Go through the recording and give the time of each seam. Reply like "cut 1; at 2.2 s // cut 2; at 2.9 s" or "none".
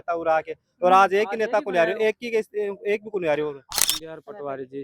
cut 1; at 3.6 s